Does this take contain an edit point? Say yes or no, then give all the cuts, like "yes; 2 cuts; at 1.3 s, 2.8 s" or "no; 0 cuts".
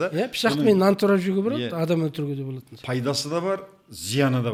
no; 0 cuts